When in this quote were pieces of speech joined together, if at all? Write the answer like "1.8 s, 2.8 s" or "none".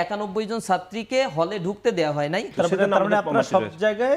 2.5 s